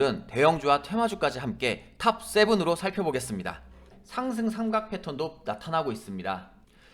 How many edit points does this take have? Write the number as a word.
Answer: one